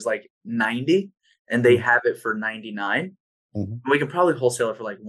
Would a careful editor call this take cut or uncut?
uncut